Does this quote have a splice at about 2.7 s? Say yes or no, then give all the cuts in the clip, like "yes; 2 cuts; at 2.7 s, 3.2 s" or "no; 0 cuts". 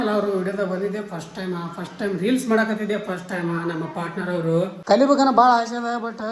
no; 1 cut; at 4.8 s